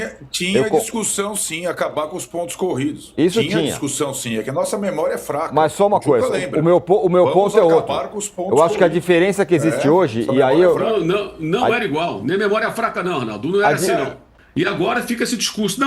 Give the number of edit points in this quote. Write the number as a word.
one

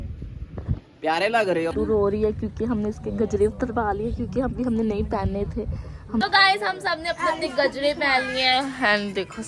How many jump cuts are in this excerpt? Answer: two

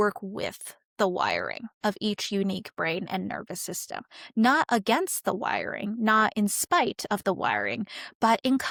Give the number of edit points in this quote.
zero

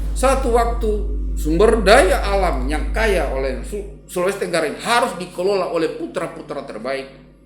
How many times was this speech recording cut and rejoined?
zero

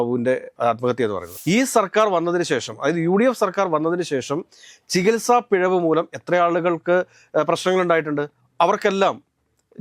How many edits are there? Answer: one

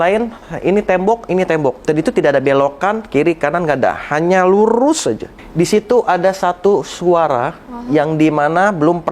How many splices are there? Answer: two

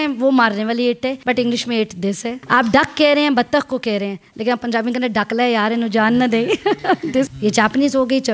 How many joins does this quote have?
three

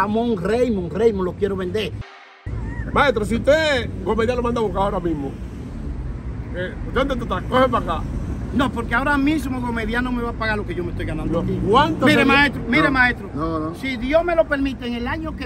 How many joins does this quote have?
one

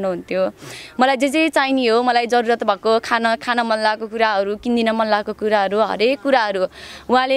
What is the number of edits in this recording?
zero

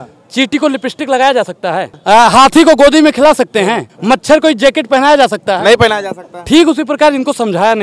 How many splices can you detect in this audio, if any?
two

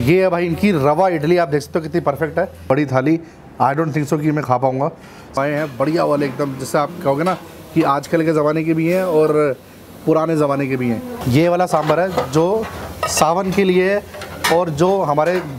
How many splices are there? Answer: three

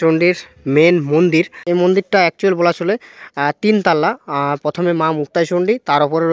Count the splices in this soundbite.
one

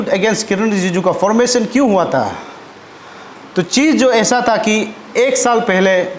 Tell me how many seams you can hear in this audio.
zero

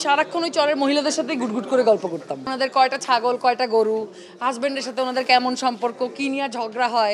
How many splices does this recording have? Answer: one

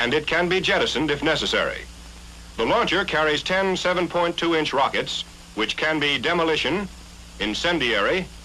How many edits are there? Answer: one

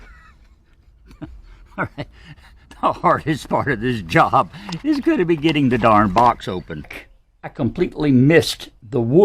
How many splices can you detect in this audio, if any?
one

